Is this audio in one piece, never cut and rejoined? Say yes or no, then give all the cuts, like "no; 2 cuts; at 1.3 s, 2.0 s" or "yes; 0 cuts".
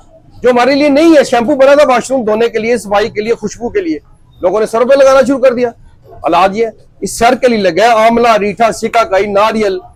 yes; 0 cuts